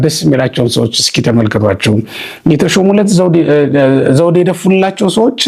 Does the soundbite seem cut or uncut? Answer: uncut